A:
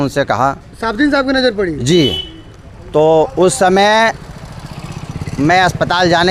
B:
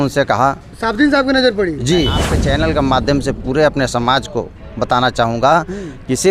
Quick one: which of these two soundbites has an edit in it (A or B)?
B